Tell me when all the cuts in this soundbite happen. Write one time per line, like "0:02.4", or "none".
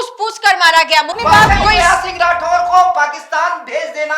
0:01.2

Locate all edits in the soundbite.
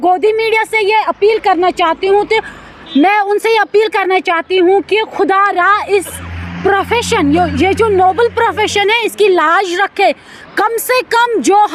none

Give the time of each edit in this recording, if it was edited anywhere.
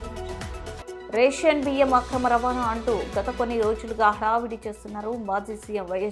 0:01.0

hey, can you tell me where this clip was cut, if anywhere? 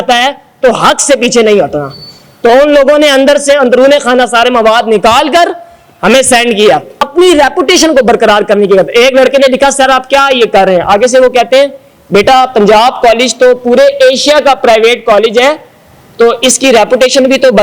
0:07.0

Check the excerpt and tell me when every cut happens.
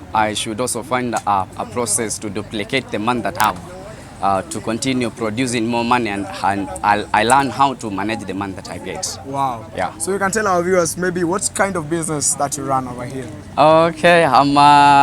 none

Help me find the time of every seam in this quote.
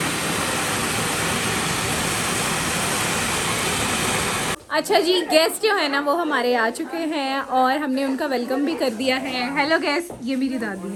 none

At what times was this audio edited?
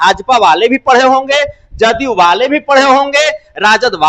none

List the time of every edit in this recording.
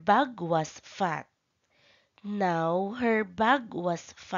0:03.2

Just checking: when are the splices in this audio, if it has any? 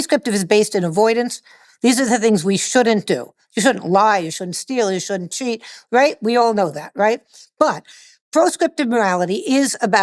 0:07.3

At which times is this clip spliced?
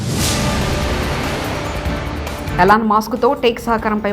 0:02.4

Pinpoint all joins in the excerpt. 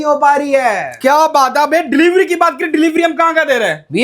none

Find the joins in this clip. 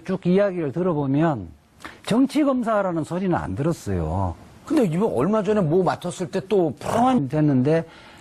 none

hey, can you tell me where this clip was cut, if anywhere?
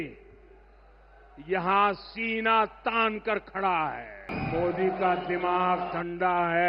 0:04.3

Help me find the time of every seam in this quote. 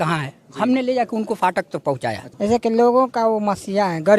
0:02.3

